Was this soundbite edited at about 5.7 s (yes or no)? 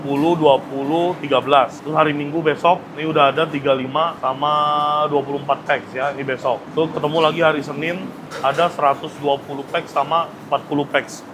no